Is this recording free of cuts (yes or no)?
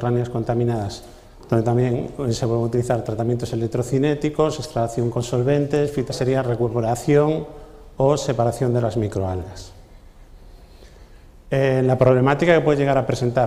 yes